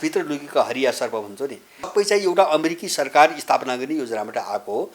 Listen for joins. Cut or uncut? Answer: cut